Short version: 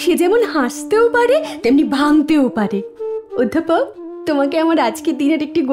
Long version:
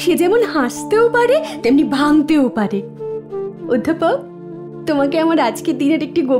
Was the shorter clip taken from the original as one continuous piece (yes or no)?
no